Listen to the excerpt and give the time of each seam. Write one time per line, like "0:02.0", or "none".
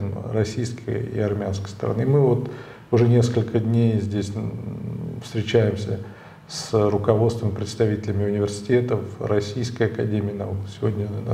none